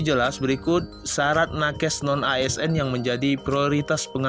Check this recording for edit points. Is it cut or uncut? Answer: uncut